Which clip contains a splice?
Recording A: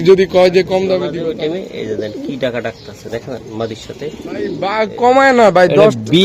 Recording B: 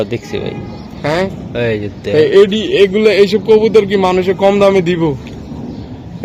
A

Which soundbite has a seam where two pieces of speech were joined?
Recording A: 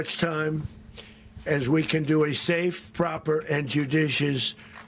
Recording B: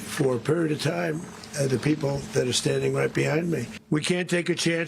B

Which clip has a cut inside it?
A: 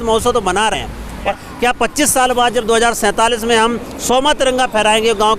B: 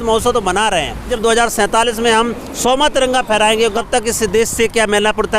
B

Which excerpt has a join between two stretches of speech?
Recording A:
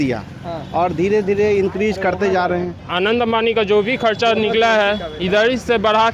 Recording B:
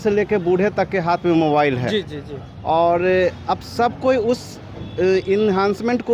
A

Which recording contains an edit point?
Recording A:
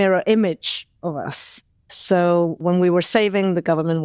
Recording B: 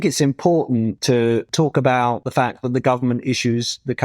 B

